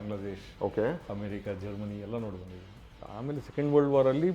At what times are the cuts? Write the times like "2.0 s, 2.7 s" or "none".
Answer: 3.1 s